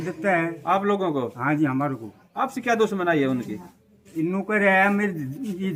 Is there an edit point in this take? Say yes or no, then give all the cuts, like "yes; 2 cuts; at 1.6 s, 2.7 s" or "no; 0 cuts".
no; 0 cuts